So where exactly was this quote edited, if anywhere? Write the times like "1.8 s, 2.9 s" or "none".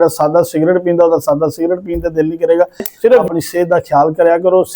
3.2 s